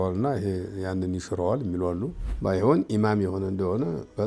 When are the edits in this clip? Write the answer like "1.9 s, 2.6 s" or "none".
2.2 s